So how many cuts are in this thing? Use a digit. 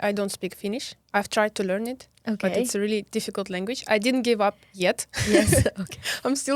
0